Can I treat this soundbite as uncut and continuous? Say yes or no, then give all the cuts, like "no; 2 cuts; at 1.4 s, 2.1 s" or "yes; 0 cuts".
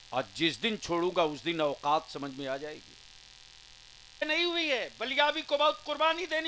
no; 1 cut; at 4.2 s